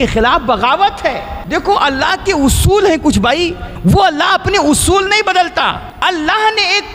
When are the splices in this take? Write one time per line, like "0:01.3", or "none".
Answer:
0:01.3
0:03.7
0:05.9